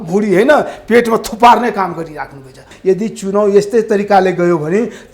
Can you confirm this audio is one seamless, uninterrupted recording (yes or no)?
no